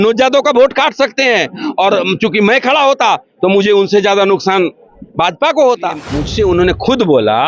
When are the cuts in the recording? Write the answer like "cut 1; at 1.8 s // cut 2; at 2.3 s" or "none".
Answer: cut 1; at 6.2 s